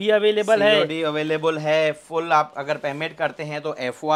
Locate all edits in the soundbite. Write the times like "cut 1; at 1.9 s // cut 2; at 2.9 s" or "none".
none